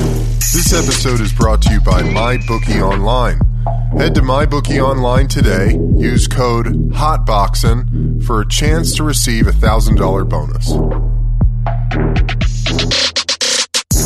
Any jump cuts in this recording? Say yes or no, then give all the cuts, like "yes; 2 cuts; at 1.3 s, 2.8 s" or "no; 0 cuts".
no; 0 cuts